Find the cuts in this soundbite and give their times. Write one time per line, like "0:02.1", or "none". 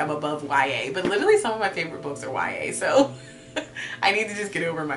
none